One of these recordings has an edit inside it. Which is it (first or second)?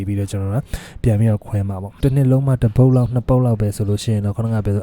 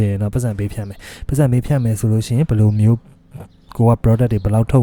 first